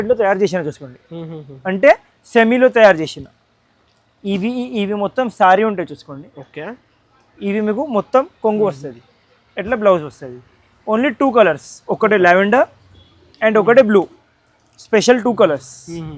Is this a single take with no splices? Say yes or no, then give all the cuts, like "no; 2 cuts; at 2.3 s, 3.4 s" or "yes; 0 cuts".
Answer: yes; 0 cuts